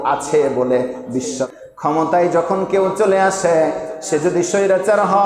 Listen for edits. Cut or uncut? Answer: cut